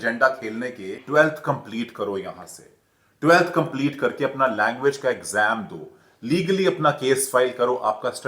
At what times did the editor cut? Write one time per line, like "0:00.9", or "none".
0:01.0